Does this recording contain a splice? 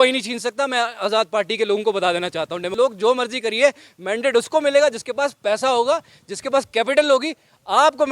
yes; 1 cut; at 2.6 s

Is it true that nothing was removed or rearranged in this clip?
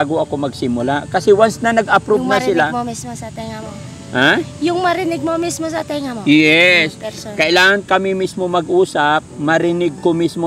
yes; 0 cuts

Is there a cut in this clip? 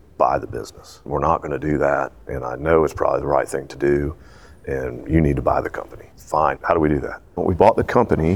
yes; 1 cut; at 7.4 s

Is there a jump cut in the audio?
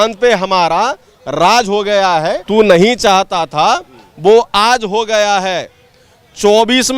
yes; 1 cut; at 2.4 s

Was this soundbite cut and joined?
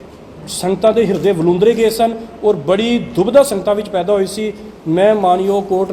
no; 0 cuts

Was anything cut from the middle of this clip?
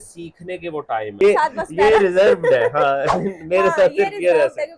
yes; 1 cut; at 1.2 s

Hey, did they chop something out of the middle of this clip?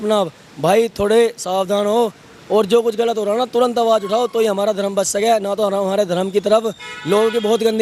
no; 0 cuts

